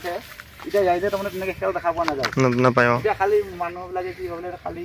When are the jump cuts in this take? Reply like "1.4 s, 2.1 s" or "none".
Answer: none